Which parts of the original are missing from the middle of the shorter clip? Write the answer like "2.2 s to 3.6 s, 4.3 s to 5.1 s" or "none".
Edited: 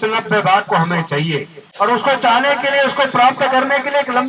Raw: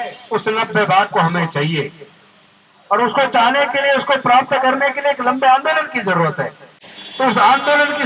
2.0 s to 2.7 s